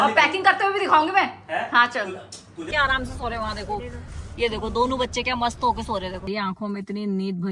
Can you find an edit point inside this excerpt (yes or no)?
yes